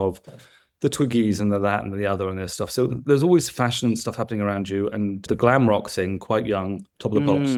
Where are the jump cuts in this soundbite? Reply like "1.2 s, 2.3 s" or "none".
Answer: none